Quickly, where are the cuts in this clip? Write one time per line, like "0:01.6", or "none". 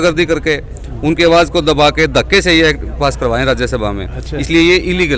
none

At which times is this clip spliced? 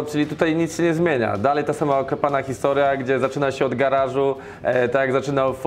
none

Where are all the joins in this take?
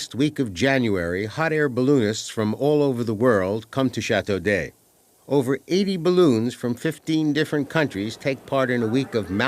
0:04.0

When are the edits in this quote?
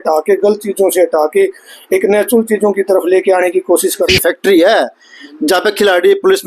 0:04.1

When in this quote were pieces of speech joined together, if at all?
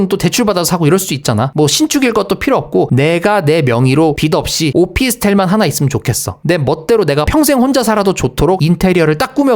0:01.5

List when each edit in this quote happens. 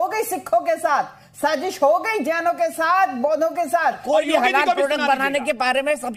0:04.0

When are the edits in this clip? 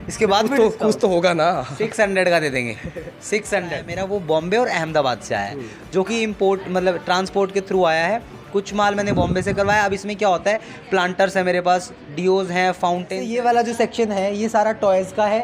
0:03.9
0:13.2

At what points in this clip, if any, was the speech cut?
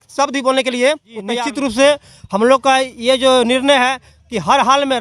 0:01.3

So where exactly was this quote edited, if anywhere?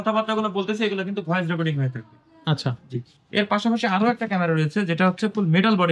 none

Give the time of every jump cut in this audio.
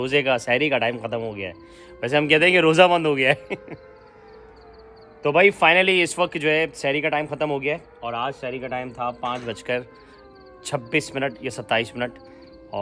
none

